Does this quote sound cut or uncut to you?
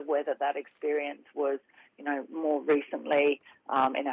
uncut